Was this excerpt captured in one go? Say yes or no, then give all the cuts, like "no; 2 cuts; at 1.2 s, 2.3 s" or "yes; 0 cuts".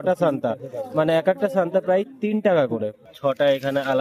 no; 1 cut; at 3.0 s